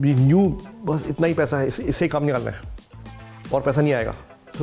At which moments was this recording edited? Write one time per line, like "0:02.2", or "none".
none